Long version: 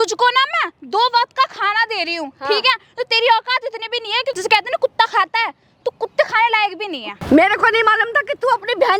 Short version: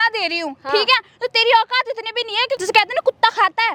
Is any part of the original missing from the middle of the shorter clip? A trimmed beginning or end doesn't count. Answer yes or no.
no